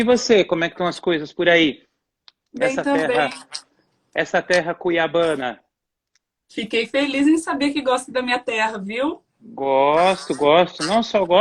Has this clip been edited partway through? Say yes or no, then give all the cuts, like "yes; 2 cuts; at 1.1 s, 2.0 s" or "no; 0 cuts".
yes; 1 cut; at 8.4 s